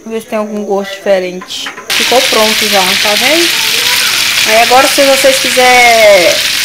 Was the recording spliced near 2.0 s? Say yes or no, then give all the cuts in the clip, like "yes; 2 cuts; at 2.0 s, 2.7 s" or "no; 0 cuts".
yes; 1 cut; at 2.0 s